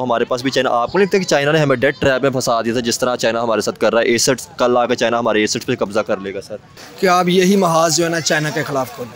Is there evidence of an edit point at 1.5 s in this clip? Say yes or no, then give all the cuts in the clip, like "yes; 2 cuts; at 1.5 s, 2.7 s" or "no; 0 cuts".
no; 1 cut; at 6.8 s